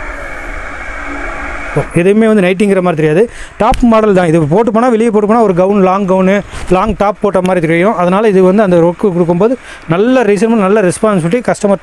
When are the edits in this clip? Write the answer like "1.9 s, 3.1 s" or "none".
1.8 s